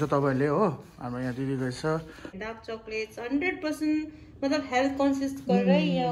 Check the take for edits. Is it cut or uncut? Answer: cut